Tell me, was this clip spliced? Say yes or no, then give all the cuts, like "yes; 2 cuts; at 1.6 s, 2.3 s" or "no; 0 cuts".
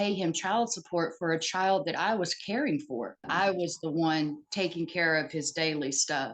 yes; 1 cut; at 3.3 s